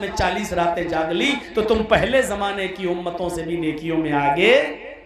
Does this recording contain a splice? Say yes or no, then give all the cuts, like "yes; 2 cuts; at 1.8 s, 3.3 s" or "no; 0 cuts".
no; 0 cuts